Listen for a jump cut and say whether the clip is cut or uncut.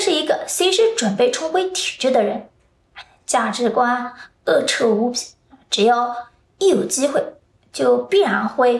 uncut